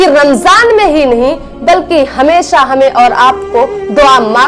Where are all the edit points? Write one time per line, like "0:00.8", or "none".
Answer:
none